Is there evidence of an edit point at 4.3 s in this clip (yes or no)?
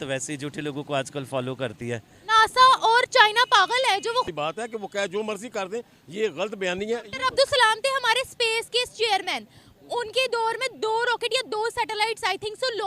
yes